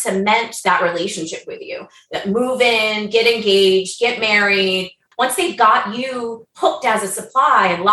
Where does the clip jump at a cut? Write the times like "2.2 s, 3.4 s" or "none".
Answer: 5.0 s